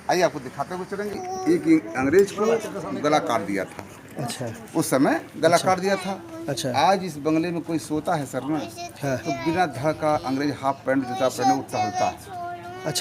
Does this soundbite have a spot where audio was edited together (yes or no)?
yes